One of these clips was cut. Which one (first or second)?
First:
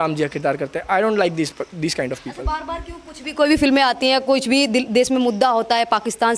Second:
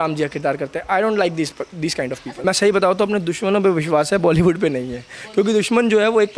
second